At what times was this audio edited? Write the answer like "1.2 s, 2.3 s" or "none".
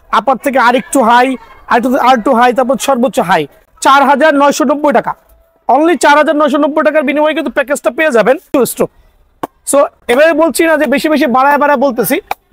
3.7 s, 8.5 s